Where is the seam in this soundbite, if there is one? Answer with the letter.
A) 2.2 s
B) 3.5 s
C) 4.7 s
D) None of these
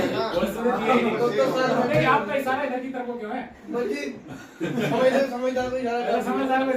D